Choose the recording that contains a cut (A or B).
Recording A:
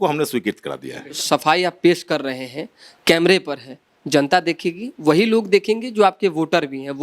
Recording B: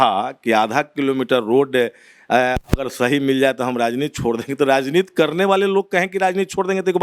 A